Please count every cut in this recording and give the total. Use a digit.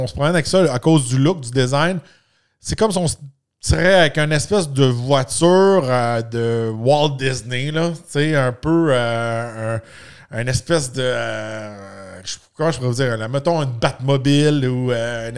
0